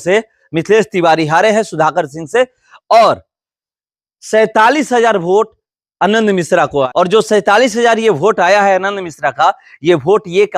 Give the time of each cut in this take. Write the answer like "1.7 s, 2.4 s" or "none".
6.9 s